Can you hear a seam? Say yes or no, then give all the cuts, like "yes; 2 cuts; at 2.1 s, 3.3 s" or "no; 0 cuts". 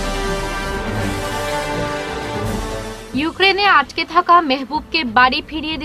yes; 1 cut; at 2.3 s